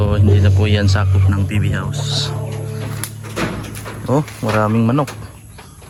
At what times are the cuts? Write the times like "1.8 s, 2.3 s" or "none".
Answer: none